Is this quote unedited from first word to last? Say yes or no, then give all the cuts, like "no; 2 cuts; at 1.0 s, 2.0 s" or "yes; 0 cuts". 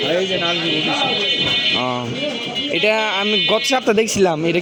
yes; 0 cuts